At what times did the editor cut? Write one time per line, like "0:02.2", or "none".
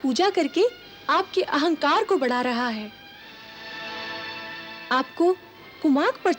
none